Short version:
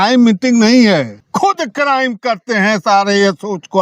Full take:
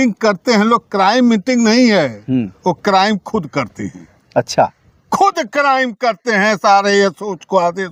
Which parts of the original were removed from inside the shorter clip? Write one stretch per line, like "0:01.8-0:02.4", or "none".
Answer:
0:02.2-0:04.9

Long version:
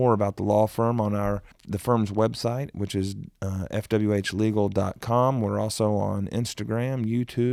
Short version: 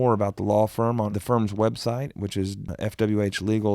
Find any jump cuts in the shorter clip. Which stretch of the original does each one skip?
0:01.1-0:01.7
0:03.3-0:03.6

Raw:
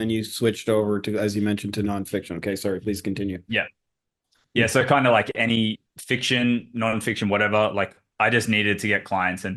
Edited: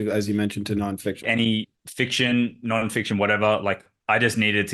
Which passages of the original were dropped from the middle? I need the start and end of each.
0:02.3-0:05.3

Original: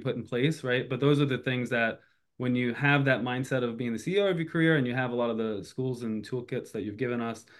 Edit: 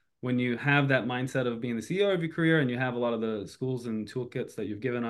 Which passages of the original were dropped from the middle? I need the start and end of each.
none

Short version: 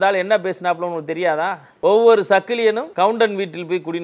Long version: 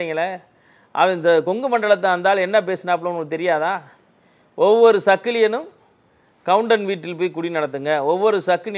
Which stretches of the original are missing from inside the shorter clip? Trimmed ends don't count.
0:03.9-0:04.4
0:05.6-0:06.4

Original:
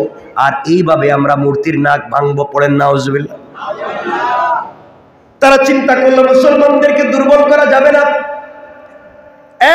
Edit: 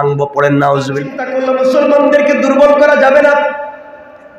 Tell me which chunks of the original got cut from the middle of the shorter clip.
0:03.4-0:05.9

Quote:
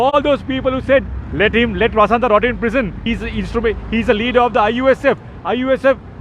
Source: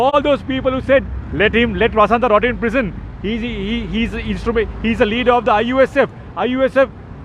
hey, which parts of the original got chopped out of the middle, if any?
0:03.0-0:03.9

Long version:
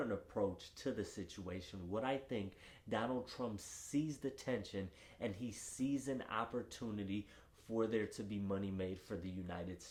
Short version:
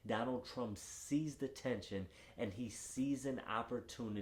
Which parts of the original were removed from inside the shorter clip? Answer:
none

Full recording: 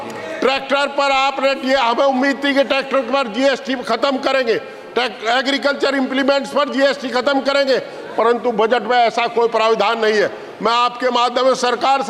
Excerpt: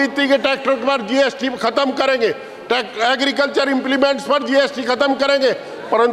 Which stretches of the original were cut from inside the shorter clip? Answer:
none

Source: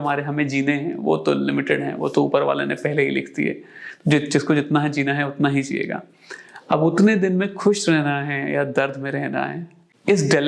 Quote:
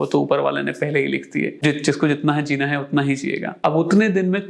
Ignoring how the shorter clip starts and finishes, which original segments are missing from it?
0:03.6-0:04.0
0:06.0-0:06.6

